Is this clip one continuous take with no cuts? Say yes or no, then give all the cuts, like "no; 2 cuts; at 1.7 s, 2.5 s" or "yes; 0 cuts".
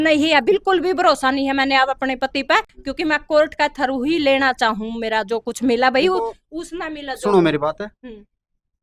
yes; 0 cuts